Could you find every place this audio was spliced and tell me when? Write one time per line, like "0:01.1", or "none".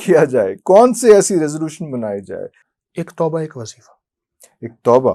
0:02.6